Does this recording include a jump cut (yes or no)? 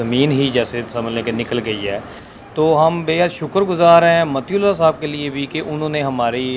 no